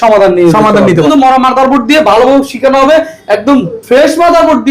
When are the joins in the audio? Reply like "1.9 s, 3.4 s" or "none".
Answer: 1.1 s